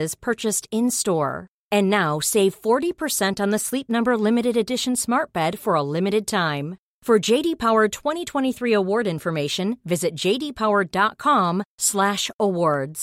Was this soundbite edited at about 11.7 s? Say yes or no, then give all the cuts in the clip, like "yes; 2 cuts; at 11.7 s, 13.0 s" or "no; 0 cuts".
no; 0 cuts